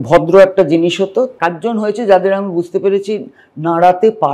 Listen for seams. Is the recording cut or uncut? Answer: cut